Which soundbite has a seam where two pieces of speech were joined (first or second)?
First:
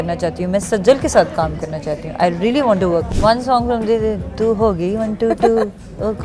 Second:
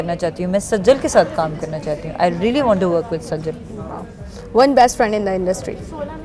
first